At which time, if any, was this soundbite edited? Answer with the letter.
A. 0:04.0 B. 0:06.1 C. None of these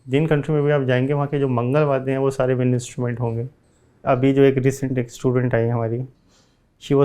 A